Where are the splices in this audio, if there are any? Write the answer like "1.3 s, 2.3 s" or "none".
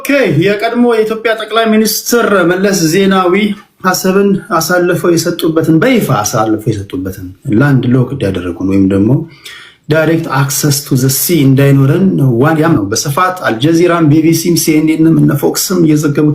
12.8 s